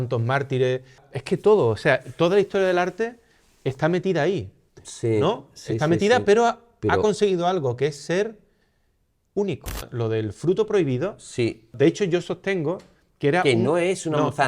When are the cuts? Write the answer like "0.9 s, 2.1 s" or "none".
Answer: 1.1 s, 9.8 s, 11.7 s